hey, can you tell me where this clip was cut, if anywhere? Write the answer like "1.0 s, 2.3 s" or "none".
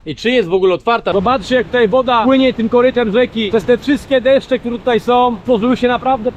1.1 s, 2.2 s, 3.4 s, 5.4 s

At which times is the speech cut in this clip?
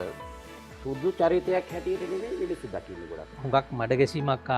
3.4 s

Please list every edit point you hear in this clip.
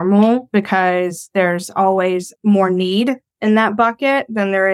none

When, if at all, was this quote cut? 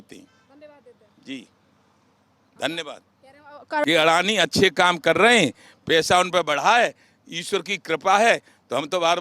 3.8 s

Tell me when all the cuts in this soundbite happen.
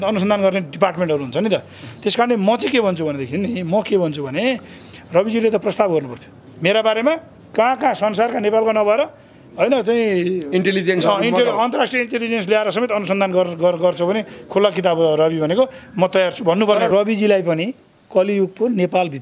16.9 s

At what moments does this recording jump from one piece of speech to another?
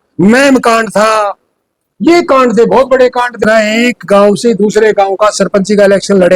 3.4 s

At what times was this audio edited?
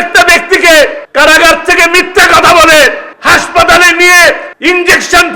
1.0 s, 3.1 s, 4.5 s

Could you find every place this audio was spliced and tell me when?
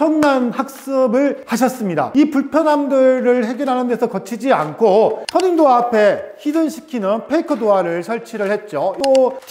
5.2 s

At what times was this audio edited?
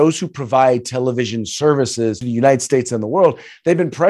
2.2 s

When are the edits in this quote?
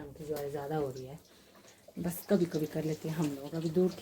none

